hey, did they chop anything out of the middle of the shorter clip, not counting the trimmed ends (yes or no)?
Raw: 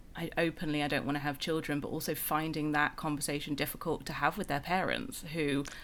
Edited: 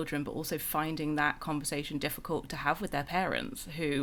no